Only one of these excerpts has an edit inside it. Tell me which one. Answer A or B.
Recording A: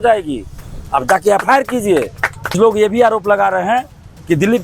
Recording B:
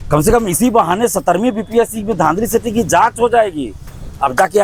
A